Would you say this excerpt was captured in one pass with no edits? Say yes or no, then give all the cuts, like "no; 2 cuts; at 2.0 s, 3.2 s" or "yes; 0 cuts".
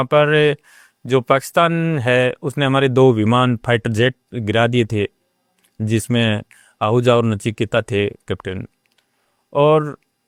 yes; 0 cuts